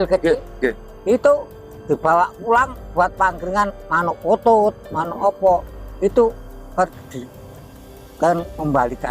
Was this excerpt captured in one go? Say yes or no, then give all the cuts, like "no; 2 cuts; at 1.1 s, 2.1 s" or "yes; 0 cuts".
yes; 0 cuts